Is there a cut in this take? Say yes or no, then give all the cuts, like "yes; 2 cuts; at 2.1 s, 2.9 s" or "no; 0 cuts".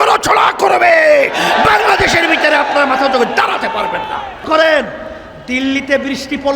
yes; 1 cut; at 4.4 s